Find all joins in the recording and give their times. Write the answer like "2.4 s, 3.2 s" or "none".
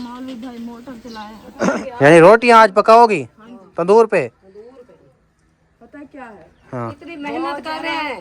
1.7 s